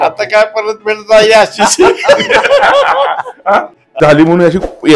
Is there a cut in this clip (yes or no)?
yes